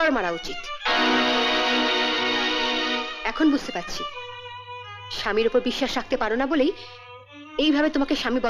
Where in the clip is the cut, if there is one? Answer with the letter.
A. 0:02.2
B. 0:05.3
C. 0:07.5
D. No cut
D